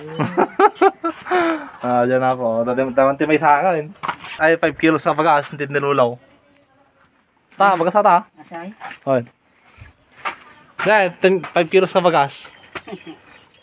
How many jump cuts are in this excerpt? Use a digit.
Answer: 1